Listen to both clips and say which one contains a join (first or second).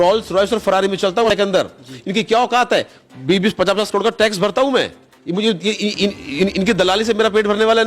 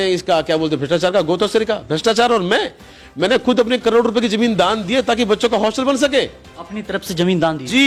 first